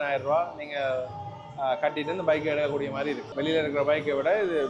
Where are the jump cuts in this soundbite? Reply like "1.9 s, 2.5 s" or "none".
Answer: 3.3 s

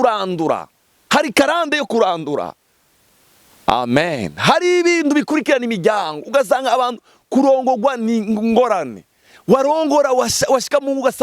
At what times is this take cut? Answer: none

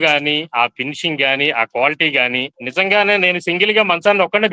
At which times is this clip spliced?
2.5 s

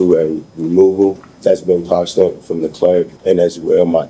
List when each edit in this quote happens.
1.3 s, 3.1 s

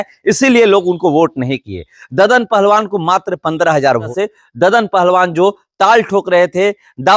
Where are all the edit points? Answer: 4.1 s

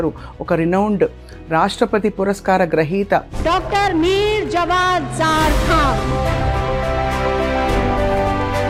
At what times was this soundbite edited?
none

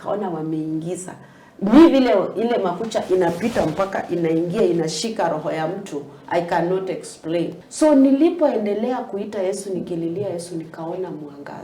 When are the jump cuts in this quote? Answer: 7.6 s

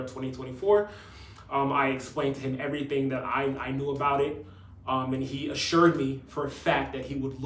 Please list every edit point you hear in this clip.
none

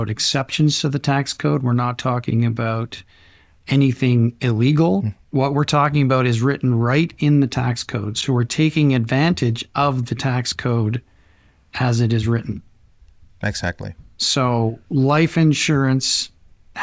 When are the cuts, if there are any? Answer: 3.5 s, 5.2 s

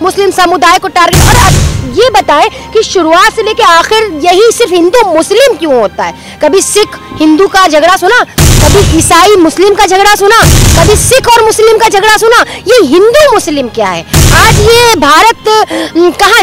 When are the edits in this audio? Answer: none

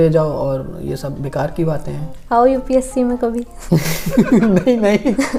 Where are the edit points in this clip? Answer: none

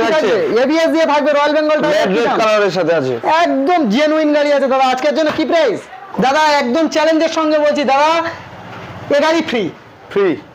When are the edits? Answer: 6.0 s

